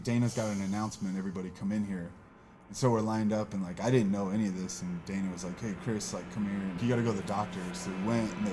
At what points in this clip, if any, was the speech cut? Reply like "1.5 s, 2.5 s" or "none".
6.8 s